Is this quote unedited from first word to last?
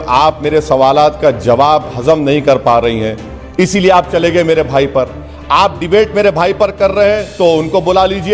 yes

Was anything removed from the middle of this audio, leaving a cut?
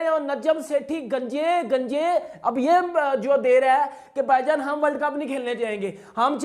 no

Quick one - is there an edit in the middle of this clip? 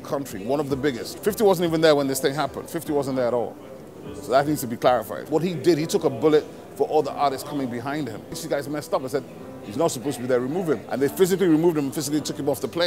yes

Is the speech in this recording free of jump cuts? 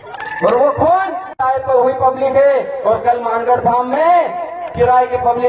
no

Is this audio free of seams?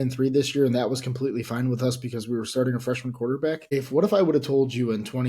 no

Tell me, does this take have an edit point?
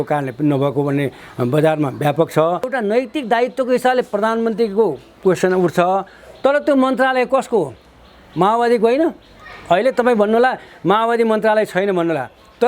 yes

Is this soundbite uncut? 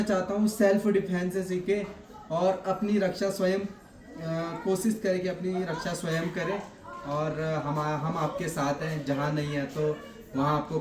yes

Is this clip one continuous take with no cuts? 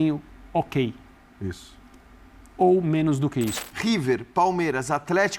no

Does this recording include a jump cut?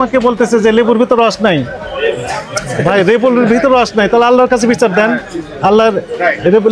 no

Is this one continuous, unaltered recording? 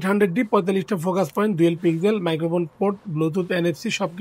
yes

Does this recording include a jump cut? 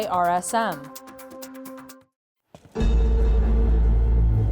yes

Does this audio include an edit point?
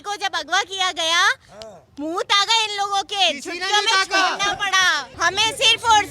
yes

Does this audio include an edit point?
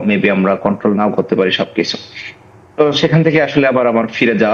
no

